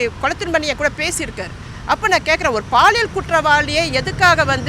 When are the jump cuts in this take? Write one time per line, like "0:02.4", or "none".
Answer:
none